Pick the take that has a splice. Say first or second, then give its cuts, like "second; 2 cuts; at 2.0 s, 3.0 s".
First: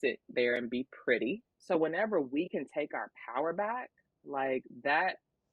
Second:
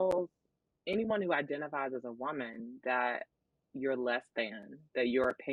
first; 1 cut; at 1.5 s